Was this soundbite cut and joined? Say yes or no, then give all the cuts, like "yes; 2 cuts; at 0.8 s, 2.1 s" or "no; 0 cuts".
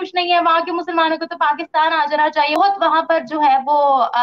yes; 1 cut; at 2.6 s